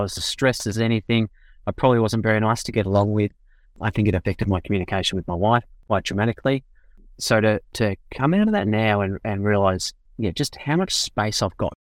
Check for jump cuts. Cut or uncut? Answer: uncut